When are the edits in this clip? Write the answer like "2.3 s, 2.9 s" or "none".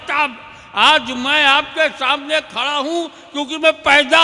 none